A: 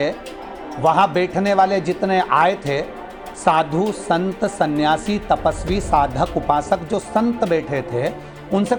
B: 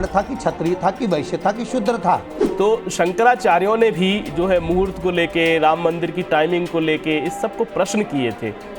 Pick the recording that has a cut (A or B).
B